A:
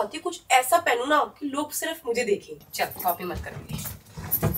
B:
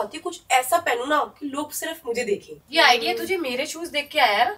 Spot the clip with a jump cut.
A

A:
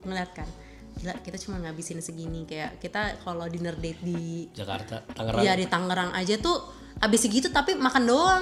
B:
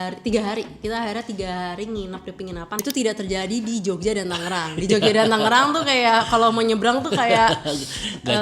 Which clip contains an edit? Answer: B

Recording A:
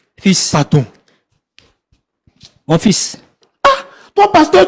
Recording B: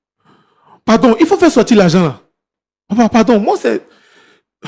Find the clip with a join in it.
A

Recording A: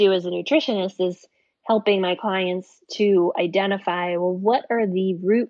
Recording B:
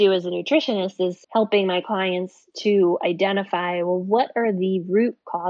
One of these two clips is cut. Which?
B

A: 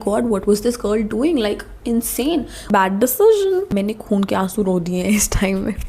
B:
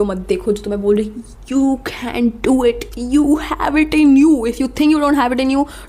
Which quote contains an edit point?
A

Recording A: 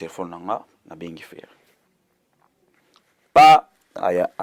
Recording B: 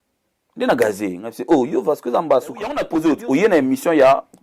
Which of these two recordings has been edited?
B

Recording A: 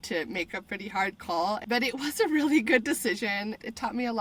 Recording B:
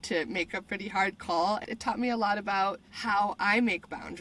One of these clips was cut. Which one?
B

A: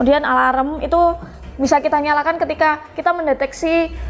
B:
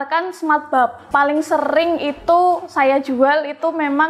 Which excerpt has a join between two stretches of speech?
B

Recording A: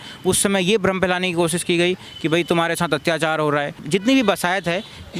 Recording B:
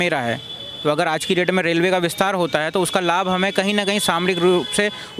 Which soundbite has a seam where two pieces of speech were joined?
A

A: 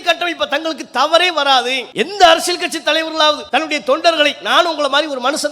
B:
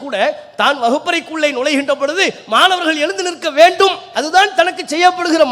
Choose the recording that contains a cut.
A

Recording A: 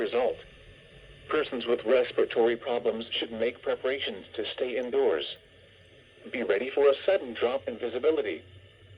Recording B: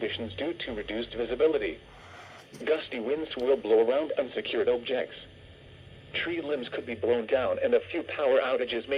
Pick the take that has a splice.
A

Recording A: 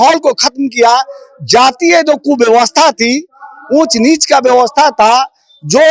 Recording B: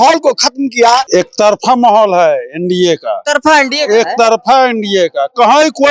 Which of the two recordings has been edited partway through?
B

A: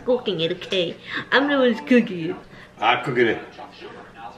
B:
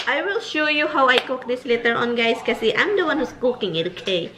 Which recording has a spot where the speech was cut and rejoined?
A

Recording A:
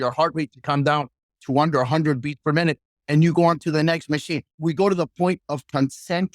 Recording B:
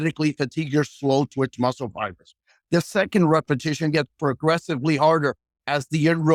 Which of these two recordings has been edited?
A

